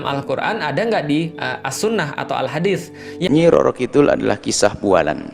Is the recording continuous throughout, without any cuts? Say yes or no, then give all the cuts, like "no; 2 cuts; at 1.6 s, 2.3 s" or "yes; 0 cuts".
no; 1 cut; at 3.3 s